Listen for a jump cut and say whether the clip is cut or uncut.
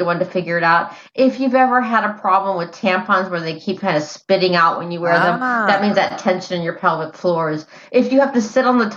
uncut